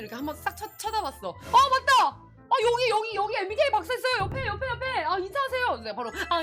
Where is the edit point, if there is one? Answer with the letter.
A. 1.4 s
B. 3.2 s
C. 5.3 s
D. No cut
A